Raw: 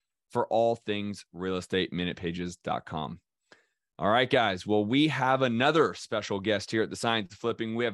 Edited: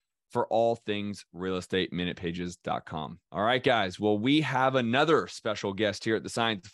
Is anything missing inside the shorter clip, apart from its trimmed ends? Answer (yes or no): yes